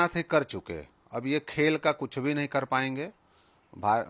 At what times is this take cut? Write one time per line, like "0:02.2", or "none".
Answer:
none